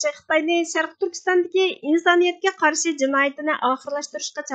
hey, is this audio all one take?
yes; 0 cuts

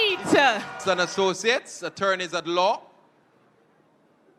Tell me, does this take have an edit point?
yes; 1 cut; at 1.1 s

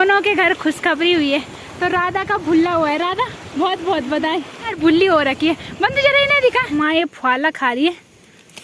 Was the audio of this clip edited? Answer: yes; 2 cuts; at 4.7 s, 6.7 s

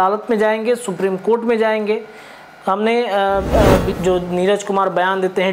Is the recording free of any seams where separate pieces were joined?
no; 1 cut; at 3.9 s

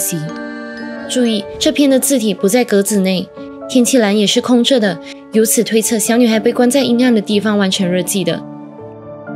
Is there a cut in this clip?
yes; 1 cut; at 1.0 s

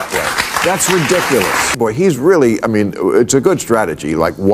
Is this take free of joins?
no; 1 cut; at 2.0 s

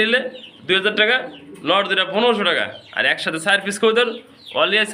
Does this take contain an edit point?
no; 0 cuts

